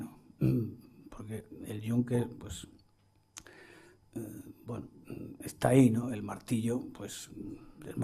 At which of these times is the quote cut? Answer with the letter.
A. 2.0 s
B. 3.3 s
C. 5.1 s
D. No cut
A